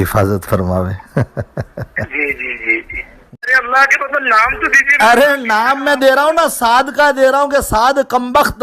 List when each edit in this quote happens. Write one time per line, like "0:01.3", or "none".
0:03.5